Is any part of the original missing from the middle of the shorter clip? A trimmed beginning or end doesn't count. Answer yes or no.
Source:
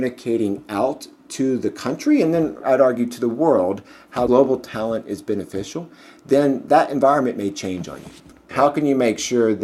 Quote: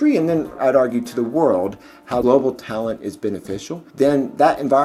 yes